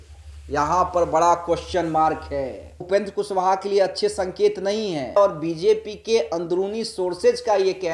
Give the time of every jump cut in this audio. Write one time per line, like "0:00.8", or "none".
0:02.9
0:05.2